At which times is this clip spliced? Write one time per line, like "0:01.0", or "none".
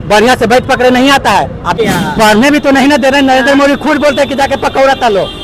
0:01.8